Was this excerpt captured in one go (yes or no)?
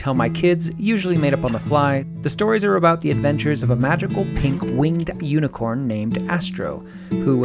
no